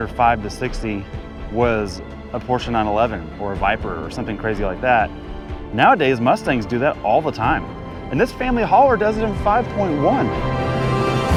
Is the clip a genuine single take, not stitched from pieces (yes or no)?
yes